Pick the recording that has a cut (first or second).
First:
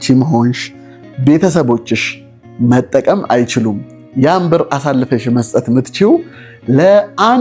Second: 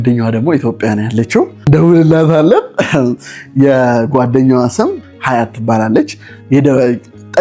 second